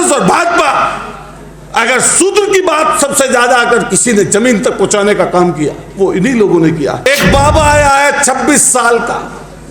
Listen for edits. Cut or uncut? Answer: cut